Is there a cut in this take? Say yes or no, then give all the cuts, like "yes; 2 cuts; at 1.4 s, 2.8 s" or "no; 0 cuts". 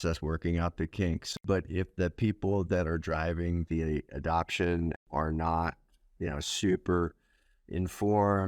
yes; 2 cuts; at 1.3 s, 5.0 s